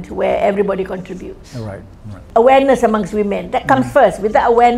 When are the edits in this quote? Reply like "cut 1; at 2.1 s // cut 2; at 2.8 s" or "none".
cut 1; at 2.2 s